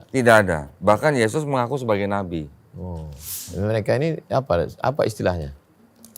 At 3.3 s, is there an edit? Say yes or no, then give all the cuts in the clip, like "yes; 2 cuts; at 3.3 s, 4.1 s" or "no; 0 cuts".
yes; 1 cut; at 3.3 s